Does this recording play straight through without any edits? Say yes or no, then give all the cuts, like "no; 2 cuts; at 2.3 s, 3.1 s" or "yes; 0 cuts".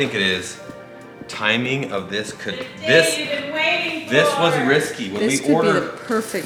yes; 0 cuts